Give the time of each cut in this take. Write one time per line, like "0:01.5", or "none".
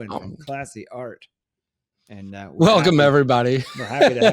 0:02.6

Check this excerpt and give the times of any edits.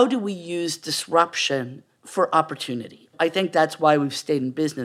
0:03.1

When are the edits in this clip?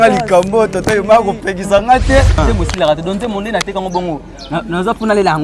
0:02.3

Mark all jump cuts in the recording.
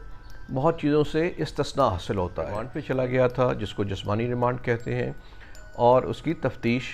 0:02.8

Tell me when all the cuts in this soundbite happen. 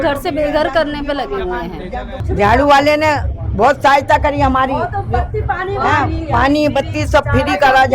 0:02.1

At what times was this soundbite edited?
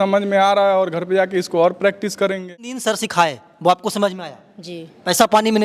0:02.7

